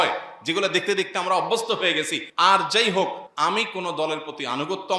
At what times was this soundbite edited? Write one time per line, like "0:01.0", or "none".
0:02.2
0:03.2